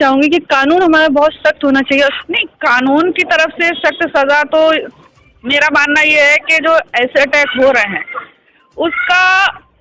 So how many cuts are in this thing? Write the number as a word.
one